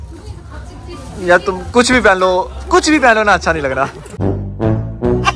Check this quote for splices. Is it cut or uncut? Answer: uncut